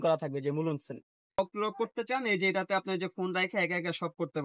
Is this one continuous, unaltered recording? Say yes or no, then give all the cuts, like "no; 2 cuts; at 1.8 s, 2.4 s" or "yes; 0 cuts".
no; 1 cut; at 1.4 s